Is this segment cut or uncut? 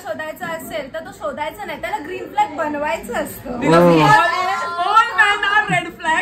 uncut